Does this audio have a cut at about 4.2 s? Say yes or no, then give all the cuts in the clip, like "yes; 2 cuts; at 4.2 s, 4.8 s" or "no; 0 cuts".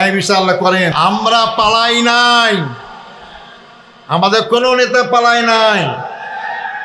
no; 1 cut; at 0.9 s